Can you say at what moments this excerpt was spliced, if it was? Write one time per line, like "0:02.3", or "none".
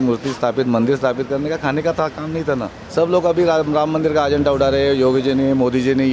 0:02.8